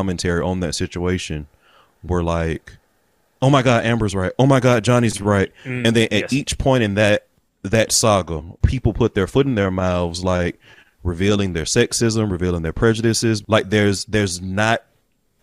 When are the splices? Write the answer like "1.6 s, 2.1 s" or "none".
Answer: 5.6 s, 8.6 s, 13.4 s